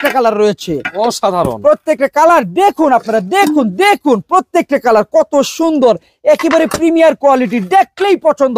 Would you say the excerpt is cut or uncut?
uncut